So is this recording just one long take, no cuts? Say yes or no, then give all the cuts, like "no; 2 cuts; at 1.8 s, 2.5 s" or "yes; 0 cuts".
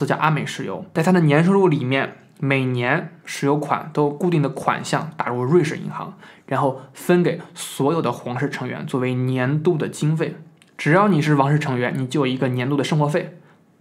no; 1 cut; at 0.9 s